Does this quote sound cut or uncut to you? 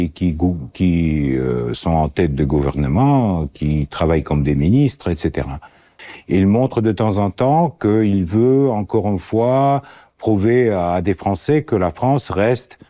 cut